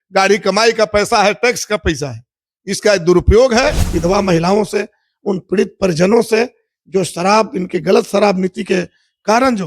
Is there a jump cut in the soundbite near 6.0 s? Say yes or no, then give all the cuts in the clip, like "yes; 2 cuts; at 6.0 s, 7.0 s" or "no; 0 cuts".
no; 1 cut; at 3.9 s